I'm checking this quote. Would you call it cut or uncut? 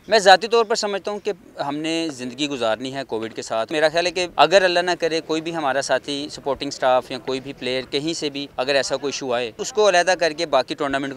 cut